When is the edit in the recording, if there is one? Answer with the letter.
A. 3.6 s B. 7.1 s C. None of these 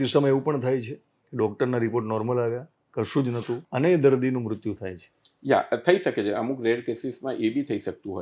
A